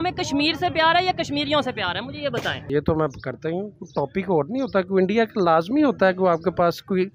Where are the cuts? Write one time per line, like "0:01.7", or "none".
0:02.7